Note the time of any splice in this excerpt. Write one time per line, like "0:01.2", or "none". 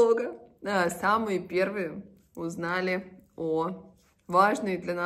none